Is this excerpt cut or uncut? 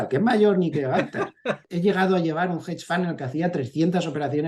cut